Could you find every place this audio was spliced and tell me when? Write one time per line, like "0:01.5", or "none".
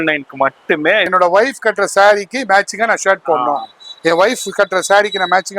0:01.1

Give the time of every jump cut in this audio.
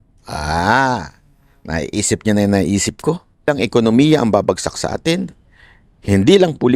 0:03.5

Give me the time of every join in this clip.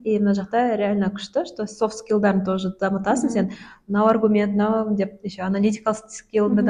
none

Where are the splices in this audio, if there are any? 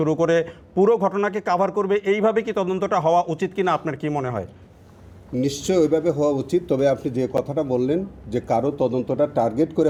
none

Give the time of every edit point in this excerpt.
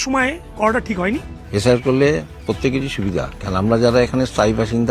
none

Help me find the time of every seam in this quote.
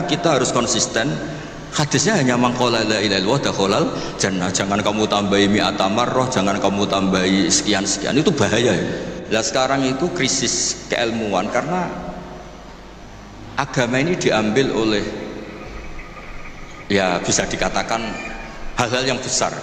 0:09.2

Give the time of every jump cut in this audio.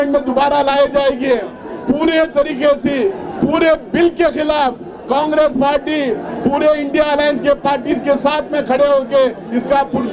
none

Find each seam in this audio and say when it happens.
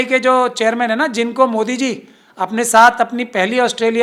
none

